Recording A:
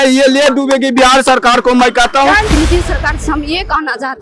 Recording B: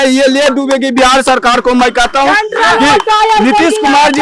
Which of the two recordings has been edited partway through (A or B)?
A